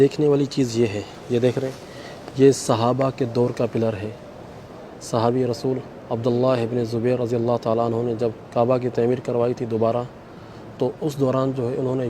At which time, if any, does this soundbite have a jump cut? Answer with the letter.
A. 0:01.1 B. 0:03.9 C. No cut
A